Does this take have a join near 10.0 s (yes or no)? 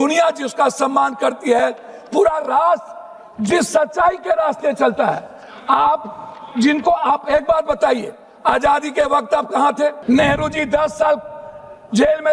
yes